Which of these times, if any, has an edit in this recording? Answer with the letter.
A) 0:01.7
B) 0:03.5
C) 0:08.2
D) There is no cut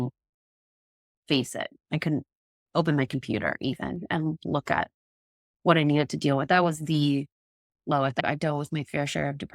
C